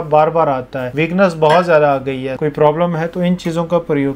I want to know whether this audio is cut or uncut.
cut